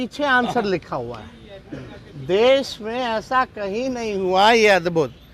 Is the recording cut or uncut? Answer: uncut